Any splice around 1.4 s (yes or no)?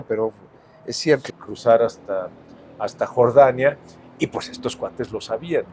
yes